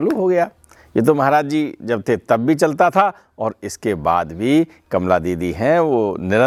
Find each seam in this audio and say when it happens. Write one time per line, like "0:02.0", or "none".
none

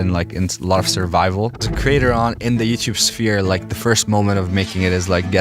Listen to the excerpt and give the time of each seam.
0:01.7

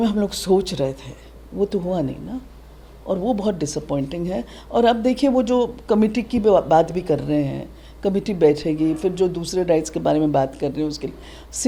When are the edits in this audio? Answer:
none

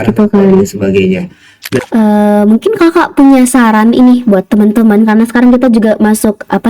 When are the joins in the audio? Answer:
0:01.8

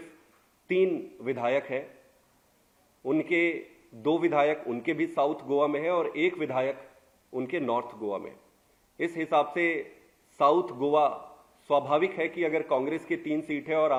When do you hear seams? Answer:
none

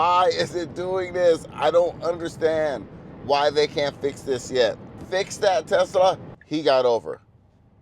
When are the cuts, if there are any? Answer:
0:04.9
0:06.3

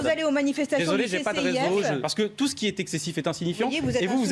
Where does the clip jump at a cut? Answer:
0:02.1

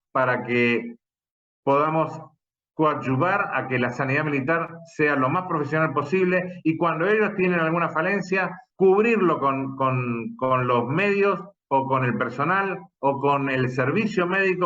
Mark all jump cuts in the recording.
0:08.6

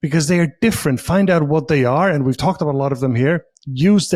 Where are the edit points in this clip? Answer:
none

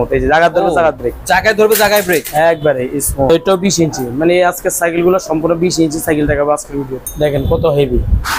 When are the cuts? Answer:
0:03.3
0:07.0

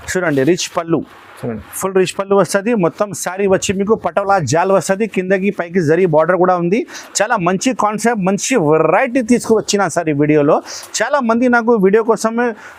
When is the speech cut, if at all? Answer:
none

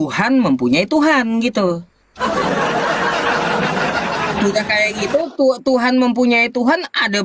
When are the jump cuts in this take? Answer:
none

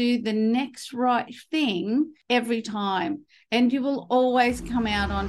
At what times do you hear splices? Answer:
0:02.2

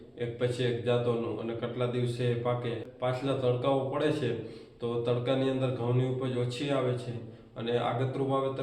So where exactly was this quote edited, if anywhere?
0:02.9

